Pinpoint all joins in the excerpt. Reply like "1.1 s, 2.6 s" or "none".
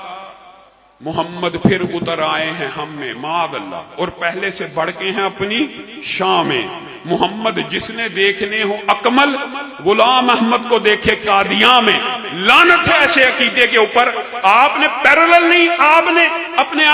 none

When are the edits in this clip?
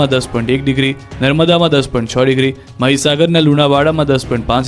2.8 s

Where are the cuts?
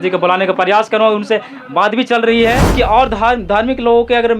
2.7 s

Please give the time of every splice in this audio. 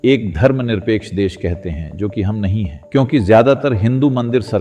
2.8 s

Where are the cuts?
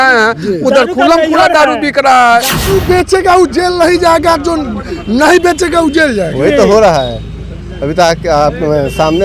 2.7 s

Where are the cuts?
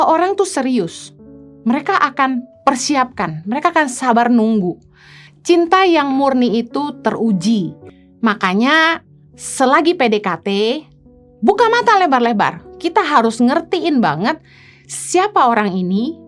7.8 s

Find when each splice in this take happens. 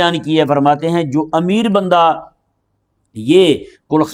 none

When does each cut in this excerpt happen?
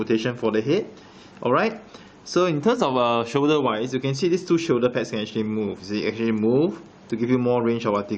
1.9 s

